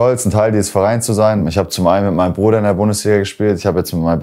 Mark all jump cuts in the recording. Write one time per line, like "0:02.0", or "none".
0:01.4

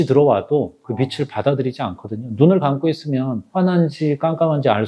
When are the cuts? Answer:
none

